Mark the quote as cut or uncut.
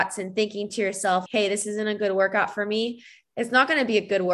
cut